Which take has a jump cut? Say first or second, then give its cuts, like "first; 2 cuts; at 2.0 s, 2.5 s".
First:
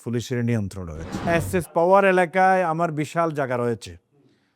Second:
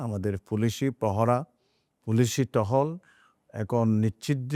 first; 1 cut; at 1.3 s